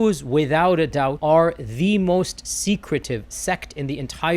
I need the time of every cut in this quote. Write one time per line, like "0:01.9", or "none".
0:01.2